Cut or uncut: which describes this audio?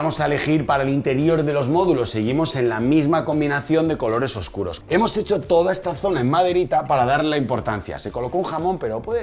cut